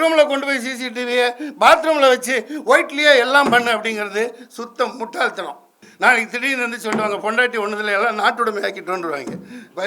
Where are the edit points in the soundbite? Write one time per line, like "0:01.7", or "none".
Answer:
0:05.8